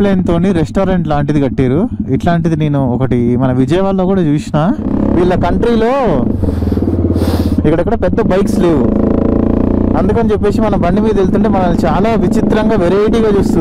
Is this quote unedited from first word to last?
no; 1 cut; at 4.9 s

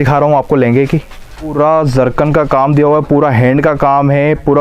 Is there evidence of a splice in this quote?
yes; 1 cut; at 1.5 s

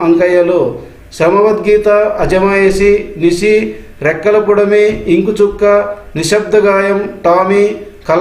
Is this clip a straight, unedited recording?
yes; 0 cuts

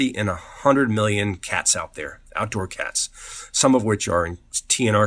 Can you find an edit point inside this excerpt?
no; 0 cuts

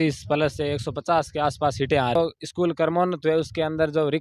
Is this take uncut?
no; 1 cut; at 2.2 s

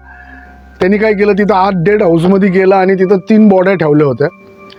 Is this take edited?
no; 0 cuts

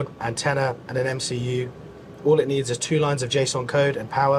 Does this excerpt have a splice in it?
no; 0 cuts

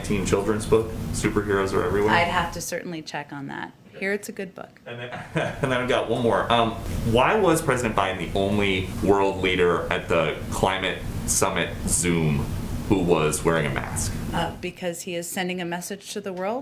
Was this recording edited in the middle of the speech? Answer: no; 0 cuts

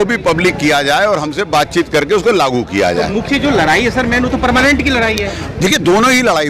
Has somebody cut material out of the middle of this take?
no; 0 cuts

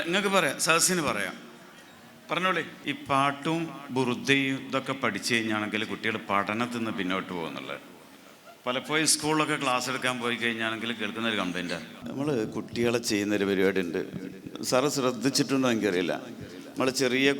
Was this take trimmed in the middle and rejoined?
yes; 2 cuts; at 2.7 s, 12.0 s

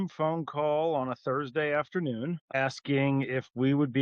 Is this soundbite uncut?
no; 1 cut; at 2.5 s

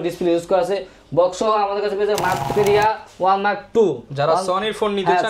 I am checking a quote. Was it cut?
yes; 1 cut; at 2.5 s

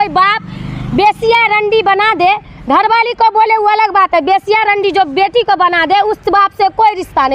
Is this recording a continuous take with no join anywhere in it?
yes; 0 cuts

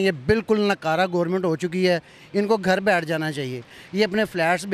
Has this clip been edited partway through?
no; 0 cuts

